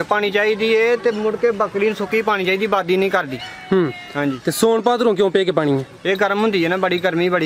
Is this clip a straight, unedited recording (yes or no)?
yes